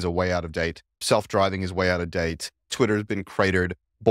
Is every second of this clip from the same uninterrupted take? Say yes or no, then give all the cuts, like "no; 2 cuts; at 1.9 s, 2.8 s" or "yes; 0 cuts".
no; 1 cut; at 2.7 s